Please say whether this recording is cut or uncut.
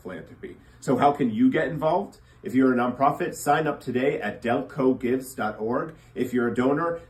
uncut